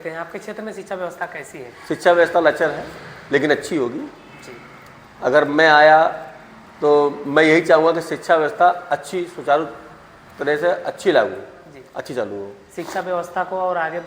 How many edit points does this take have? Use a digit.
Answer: 0